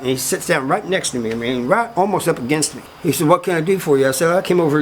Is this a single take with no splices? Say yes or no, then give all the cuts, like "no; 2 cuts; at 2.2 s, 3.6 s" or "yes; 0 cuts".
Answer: no; 1 cut; at 2.9 s